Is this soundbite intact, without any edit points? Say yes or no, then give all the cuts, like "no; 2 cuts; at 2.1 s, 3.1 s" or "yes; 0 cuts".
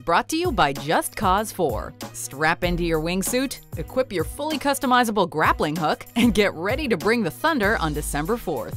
yes; 0 cuts